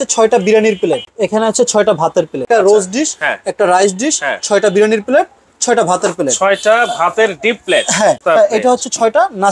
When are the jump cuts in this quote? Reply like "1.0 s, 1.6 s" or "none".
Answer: 1.1 s, 2.5 s, 8.2 s